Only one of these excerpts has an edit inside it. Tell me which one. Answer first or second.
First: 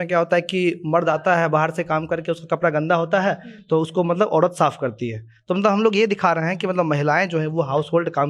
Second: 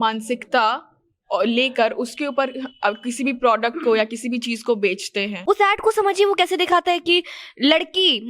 second